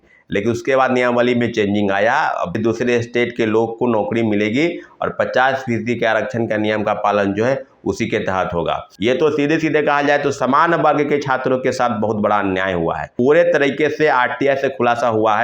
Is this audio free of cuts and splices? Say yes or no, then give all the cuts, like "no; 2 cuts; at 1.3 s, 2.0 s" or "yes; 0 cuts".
no; 3 cuts; at 2.5 s, 8.9 s, 13.1 s